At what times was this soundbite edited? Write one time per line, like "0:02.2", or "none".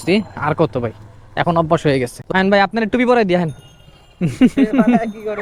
0:02.2